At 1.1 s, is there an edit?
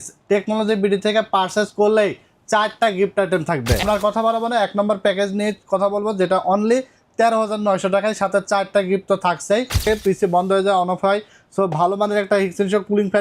no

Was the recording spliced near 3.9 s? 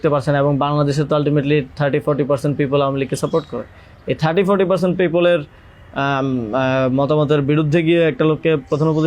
no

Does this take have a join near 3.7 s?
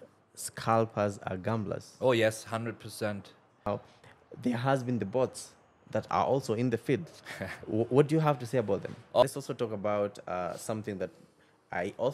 yes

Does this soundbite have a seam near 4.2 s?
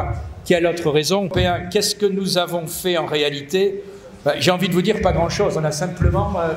no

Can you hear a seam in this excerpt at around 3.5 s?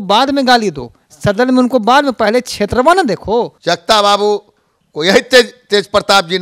yes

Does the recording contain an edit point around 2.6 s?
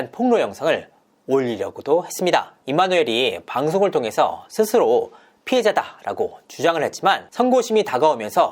yes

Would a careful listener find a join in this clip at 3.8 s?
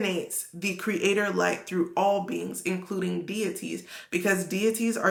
no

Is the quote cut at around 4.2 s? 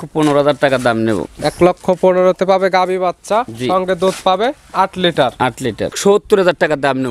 no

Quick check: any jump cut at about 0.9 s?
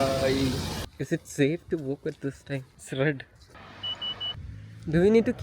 yes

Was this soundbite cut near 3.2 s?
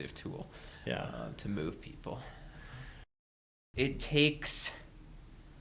yes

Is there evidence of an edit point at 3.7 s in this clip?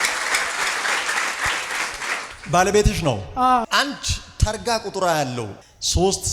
yes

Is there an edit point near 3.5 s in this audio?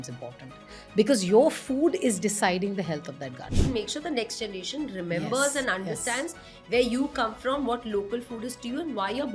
yes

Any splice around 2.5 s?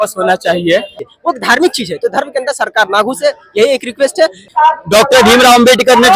no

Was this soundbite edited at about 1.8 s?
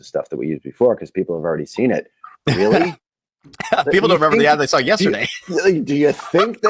no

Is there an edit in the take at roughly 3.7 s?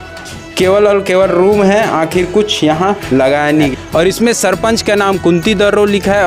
yes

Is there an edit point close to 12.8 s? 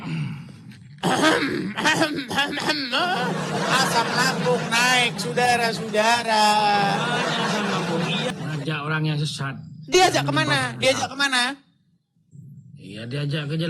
no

